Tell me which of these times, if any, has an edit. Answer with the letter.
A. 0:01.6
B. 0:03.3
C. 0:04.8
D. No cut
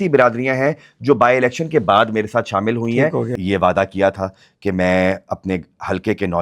B